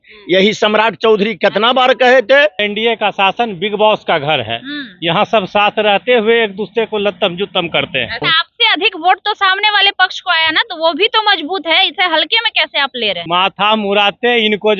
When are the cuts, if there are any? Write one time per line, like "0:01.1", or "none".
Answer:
0:02.6
0:08.4
0:13.2